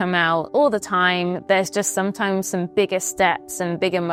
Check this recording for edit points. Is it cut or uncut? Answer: uncut